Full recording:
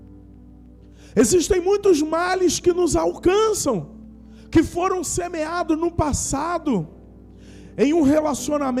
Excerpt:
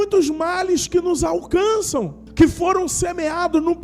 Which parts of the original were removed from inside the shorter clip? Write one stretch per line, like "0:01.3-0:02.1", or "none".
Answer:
0:03.9-0:04.3